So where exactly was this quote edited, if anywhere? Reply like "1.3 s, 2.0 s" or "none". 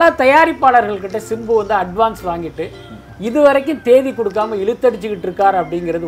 none